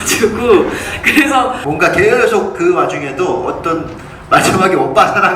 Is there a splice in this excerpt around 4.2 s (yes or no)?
no